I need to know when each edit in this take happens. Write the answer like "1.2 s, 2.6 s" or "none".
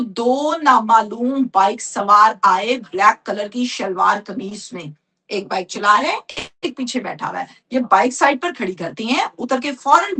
none